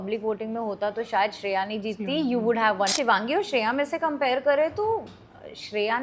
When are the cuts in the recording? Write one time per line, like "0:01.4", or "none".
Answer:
0:02.9